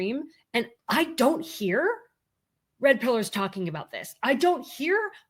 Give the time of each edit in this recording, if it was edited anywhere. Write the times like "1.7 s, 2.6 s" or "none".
none